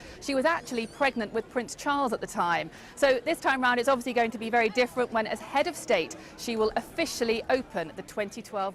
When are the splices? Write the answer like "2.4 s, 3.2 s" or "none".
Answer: none